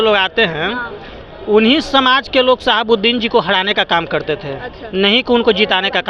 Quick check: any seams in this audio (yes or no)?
no